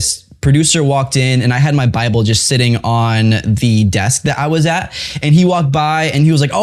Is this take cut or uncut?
uncut